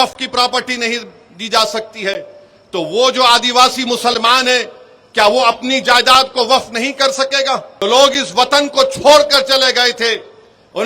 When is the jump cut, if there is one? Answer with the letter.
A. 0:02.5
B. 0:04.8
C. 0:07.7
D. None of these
C